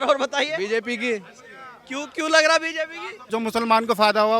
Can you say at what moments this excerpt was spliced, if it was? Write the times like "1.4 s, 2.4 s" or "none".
3.2 s